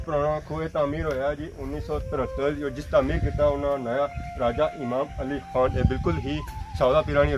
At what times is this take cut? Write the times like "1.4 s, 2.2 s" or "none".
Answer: none